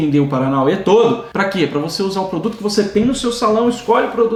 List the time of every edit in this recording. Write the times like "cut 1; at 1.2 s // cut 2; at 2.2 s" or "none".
none